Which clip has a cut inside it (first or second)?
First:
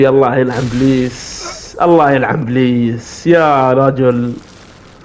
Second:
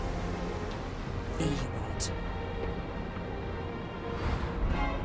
second